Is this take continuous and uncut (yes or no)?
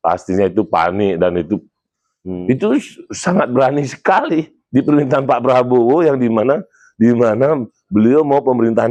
yes